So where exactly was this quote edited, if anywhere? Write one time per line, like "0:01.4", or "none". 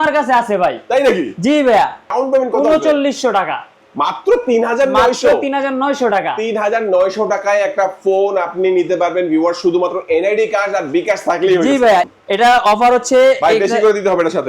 0:02.1
0:12.1